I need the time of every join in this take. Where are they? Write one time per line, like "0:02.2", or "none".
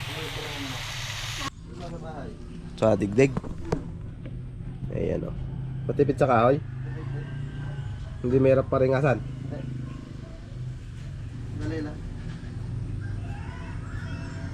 0:01.4